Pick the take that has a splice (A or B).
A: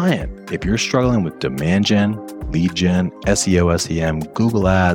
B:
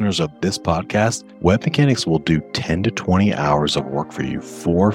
B